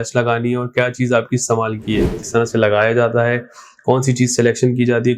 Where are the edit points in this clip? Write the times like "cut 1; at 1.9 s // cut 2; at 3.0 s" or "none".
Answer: cut 1; at 2.2 s